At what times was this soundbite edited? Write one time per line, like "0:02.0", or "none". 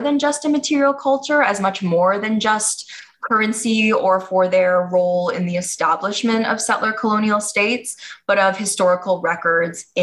none